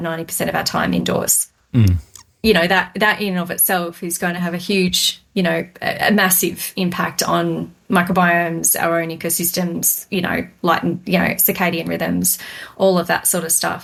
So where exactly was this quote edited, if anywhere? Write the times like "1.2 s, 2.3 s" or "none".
none